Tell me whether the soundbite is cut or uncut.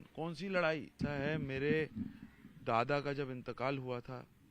cut